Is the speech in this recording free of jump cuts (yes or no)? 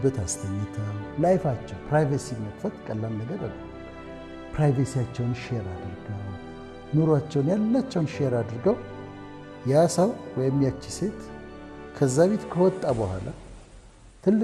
yes